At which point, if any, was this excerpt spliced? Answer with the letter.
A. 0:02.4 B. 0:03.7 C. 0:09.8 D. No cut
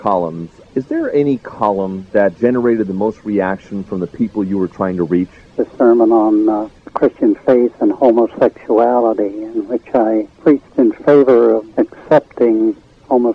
D